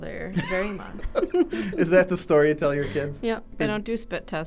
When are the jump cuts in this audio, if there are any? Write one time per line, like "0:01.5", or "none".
0:00.9
0:03.5